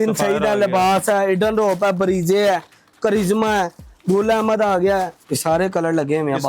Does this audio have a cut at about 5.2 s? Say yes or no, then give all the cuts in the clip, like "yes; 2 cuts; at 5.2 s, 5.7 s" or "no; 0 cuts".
yes; 1 cut; at 5.2 s